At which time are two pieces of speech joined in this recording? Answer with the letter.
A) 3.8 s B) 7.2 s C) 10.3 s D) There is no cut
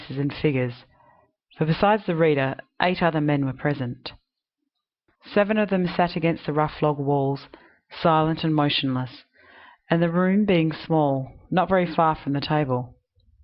A